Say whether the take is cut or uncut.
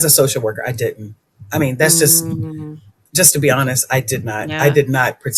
uncut